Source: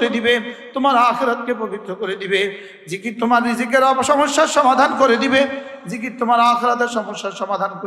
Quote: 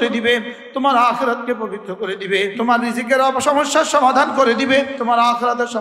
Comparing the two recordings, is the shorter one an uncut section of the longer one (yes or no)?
no